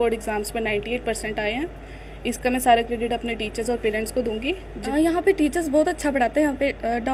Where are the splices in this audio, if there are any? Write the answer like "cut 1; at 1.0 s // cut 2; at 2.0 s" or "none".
cut 1; at 5.2 s